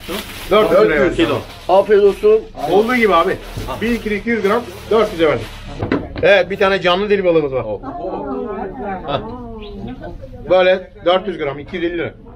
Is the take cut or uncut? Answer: cut